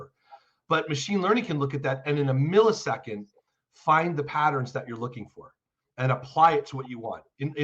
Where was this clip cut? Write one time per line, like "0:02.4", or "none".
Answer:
none